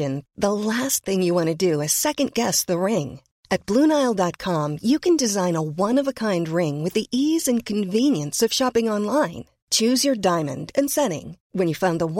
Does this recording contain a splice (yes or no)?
no